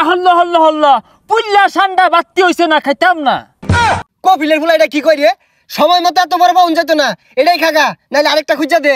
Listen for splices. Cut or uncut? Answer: cut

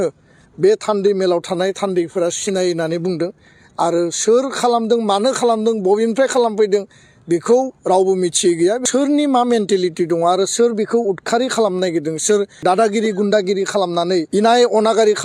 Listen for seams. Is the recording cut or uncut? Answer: cut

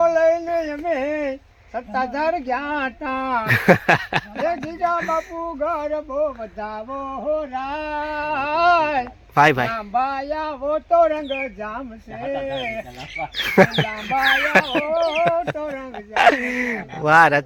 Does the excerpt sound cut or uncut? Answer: uncut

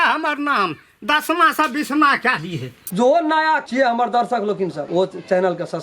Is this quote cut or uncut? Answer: cut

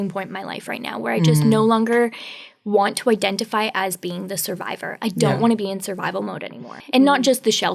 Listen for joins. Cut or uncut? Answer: uncut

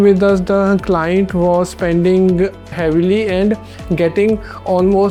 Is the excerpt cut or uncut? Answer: uncut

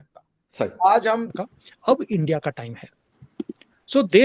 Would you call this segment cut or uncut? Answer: cut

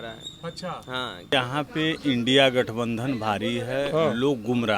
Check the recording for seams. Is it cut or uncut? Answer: cut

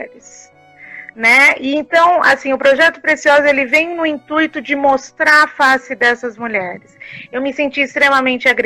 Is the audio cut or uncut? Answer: uncut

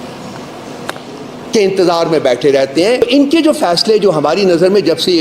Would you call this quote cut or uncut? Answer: cut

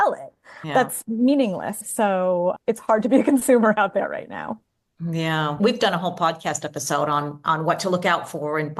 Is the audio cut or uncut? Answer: cut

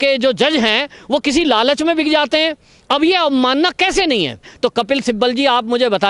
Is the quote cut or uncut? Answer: cut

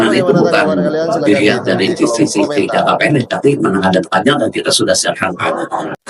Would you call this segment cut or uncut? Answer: uncut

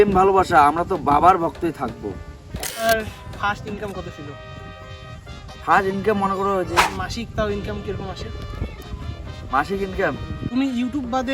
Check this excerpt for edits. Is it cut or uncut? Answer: cut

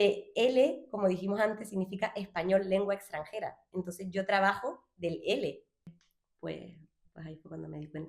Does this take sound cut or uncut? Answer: cut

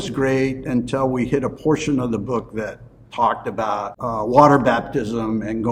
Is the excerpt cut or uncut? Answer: cut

